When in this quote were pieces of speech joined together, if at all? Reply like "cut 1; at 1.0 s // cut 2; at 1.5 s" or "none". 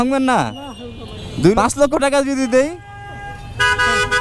cut 1; at 1.9 s